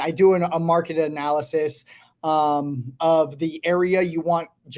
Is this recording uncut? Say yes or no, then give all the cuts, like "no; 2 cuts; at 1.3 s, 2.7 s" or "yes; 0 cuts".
yes; 0 cuts